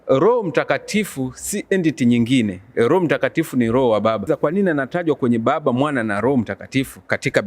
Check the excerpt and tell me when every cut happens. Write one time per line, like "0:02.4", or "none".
0:04.3